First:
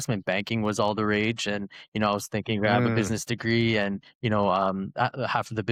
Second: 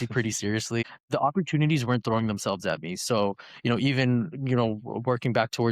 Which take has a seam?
second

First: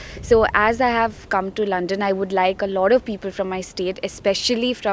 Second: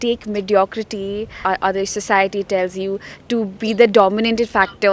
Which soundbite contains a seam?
second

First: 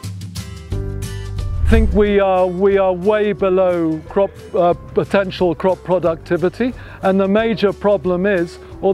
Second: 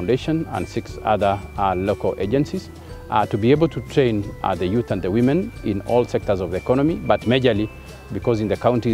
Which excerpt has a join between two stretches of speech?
first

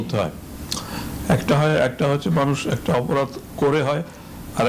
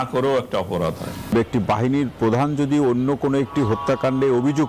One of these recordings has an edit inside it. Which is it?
second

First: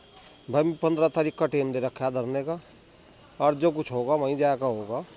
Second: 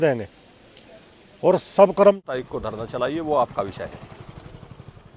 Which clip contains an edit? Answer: second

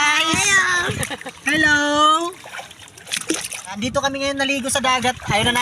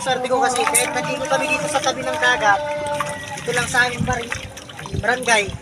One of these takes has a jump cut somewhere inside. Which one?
first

